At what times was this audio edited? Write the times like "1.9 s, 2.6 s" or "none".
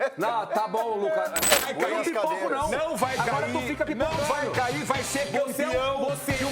1.7 s